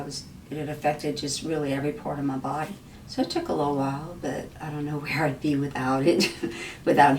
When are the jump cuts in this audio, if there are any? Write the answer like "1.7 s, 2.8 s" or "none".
2.9 s